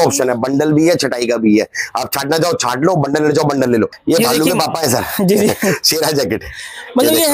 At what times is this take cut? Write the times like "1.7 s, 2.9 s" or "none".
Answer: 4.0 s